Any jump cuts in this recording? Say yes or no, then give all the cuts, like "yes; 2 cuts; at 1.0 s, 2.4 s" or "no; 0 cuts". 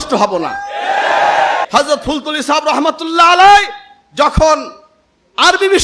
yes; 1 cut; at 1.6 s